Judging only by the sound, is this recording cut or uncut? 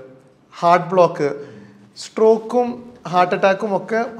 uncut